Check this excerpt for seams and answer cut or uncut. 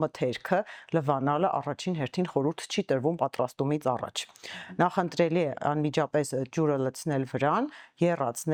uncut